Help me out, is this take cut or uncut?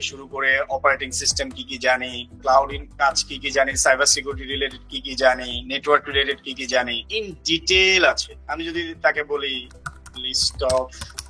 uncut